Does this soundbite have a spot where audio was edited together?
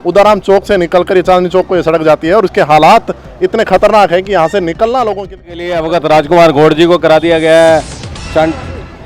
yes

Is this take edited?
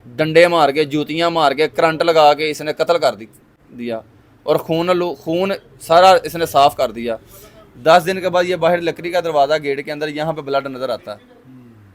no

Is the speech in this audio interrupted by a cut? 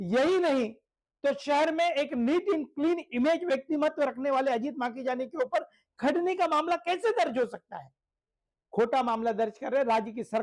no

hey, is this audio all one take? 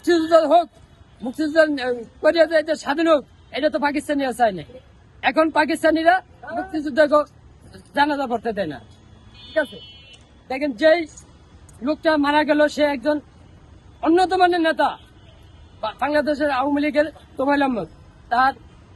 yes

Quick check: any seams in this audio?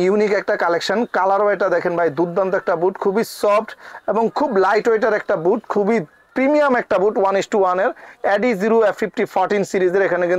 no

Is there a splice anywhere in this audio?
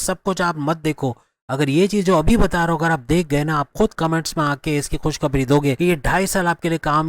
yes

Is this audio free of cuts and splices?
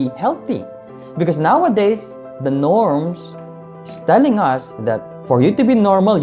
no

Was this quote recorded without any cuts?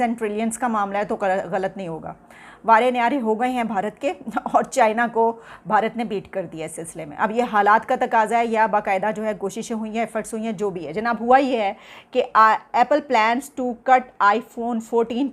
yes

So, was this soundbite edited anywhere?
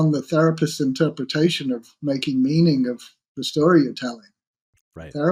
no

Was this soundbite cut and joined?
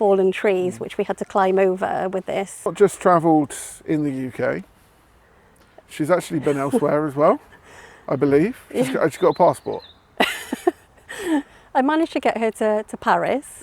yes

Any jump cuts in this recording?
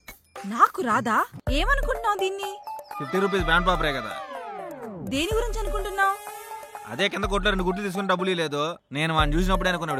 yes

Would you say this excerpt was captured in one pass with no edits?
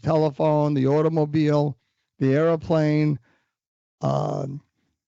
yes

